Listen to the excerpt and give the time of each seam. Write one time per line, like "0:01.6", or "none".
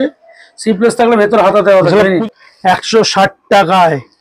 0:02.2